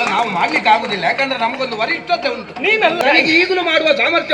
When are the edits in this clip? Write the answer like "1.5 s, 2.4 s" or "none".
3.0 s